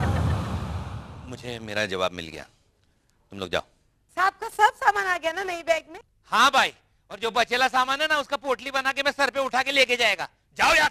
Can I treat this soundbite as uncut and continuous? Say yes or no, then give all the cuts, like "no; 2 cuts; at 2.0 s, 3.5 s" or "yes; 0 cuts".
yes; 0 cuts